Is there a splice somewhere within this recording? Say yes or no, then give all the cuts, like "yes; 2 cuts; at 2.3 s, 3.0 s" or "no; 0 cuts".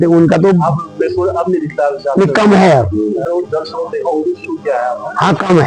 yes; 1 cut; at 3.3 s